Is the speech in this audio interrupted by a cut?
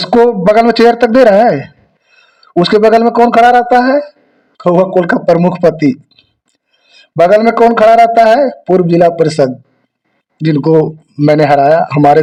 no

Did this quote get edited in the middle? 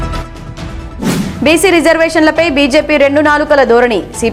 no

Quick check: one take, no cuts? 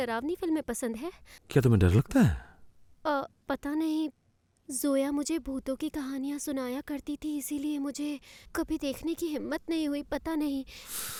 yes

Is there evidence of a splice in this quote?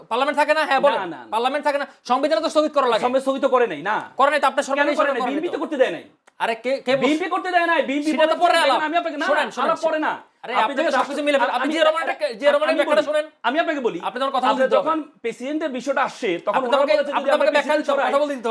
no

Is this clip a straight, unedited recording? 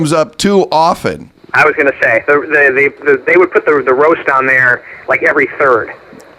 yes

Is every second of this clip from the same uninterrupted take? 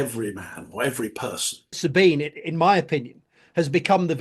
no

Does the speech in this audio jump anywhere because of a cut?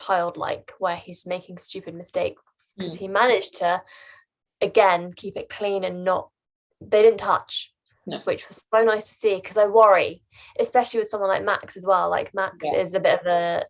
no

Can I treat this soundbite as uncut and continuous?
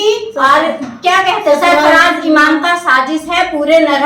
yes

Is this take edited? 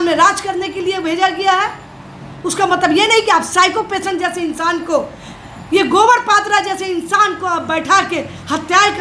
no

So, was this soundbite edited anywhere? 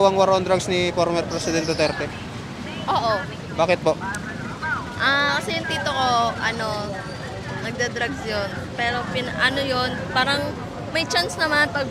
no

